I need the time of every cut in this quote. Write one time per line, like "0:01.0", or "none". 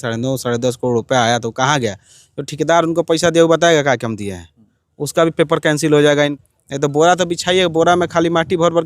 0:06.3